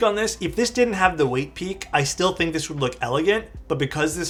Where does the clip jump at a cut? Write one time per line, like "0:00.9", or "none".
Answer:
none